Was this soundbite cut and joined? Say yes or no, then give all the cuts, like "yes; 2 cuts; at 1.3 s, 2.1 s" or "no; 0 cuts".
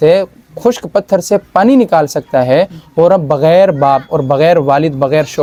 no; 0 cuts